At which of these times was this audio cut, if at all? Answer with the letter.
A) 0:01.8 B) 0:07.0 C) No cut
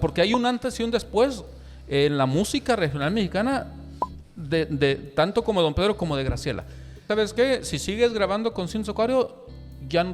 B